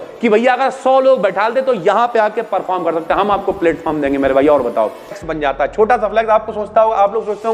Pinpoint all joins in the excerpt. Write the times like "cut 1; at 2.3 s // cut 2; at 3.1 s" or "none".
cut 1; at 5.3 s